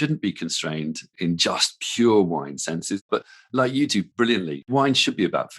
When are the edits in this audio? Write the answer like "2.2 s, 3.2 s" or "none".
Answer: 3.0 s, 4.4 s